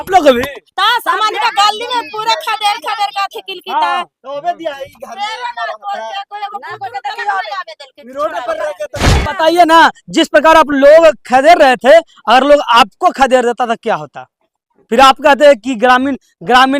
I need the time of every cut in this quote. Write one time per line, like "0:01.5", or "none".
0:09.1